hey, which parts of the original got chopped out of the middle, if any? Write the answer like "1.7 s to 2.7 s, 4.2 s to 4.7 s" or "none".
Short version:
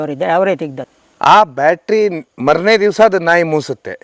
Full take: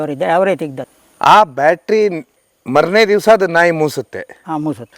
2.3 s to 2.5 s